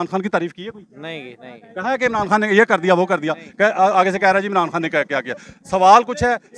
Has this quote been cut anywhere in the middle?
no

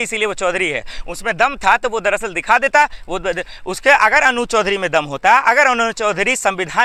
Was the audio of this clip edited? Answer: no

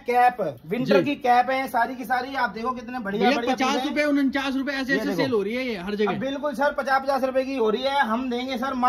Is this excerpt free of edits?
yes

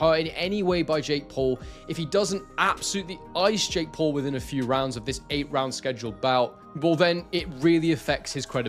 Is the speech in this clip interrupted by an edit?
no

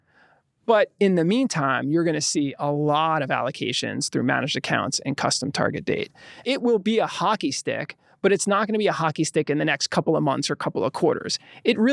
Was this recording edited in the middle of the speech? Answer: yes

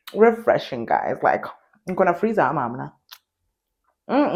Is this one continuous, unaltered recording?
yes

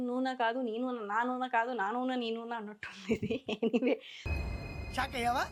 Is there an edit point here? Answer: no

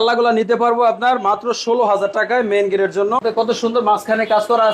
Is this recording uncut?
no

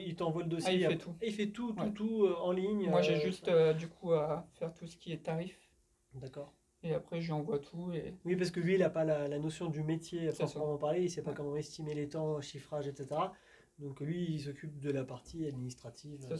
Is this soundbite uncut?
yes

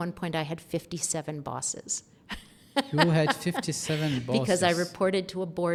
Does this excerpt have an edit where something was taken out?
no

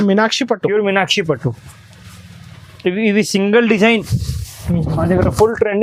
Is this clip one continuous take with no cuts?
yes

